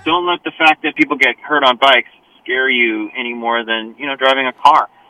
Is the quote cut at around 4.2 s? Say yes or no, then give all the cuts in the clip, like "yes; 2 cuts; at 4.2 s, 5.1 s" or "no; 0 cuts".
no; 1 cut; at 0.9 s